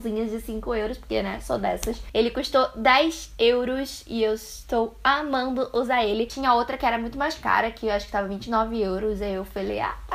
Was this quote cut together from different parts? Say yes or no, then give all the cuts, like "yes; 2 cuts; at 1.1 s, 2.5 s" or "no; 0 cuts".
yes; 2 cuts; at 2.1 s, 6.3 s